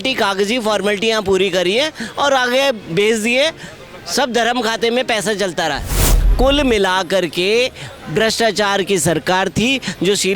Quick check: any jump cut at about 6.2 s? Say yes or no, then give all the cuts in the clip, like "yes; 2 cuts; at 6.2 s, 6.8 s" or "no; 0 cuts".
yes; 1 cut; at 6.2 s